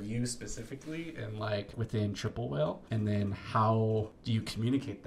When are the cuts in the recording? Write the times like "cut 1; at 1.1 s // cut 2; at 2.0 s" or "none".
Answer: cut 1; at 1.7 s // cut 2; at 2.8 s // cut 3; at 4.2 s